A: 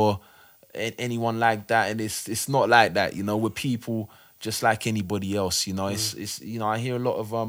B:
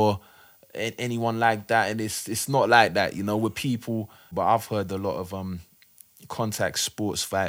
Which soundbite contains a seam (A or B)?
B